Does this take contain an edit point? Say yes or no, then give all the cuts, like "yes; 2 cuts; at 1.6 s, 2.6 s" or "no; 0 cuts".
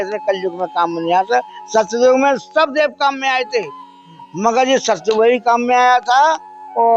no; 0 cuts